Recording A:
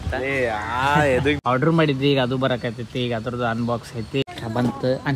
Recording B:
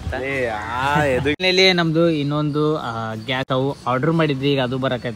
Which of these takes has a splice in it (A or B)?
A